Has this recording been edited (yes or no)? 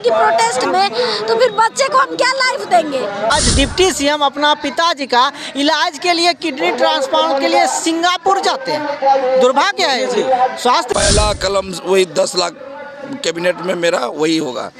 yes